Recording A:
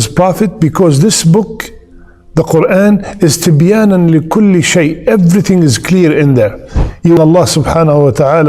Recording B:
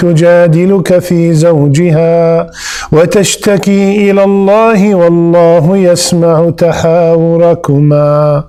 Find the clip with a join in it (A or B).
A